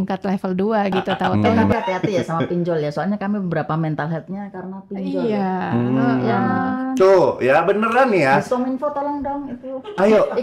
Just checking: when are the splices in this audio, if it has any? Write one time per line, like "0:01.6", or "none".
0:01.7